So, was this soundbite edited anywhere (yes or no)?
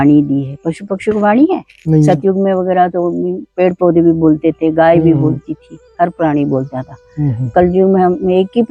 no